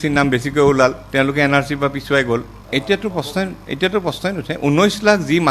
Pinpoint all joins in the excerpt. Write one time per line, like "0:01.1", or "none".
0:02.5